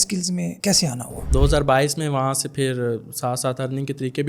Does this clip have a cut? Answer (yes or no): yes